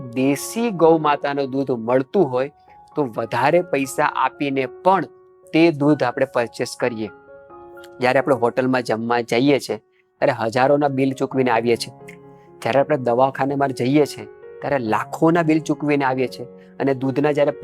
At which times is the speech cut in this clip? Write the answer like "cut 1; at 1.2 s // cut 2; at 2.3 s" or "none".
none